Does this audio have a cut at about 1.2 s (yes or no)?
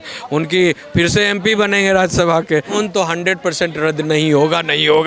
no